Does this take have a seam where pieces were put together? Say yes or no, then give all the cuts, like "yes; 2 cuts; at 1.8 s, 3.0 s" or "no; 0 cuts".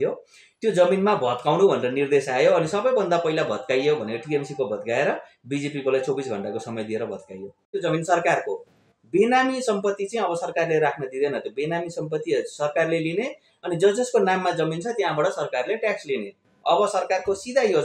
yes; 1 cut; at 7.7 s